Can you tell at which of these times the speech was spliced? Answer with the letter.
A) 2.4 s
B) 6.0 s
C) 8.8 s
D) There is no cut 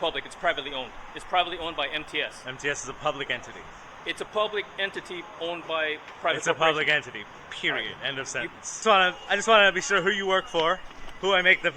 C